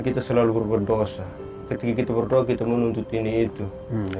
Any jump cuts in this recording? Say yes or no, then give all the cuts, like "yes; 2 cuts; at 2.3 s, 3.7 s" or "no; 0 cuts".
yes; 1 cut; at 1.7 s